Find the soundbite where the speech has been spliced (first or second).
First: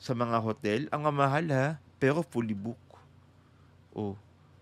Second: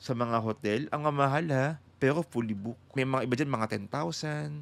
second